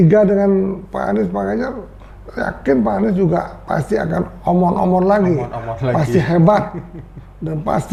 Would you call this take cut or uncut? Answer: uncut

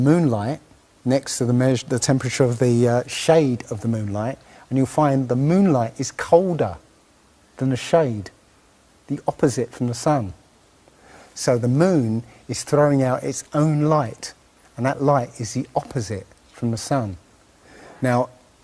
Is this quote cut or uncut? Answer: uncut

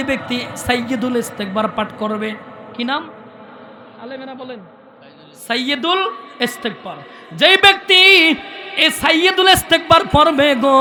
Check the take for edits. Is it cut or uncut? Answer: uncut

